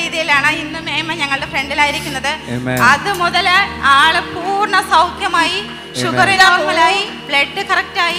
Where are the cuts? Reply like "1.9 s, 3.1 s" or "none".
none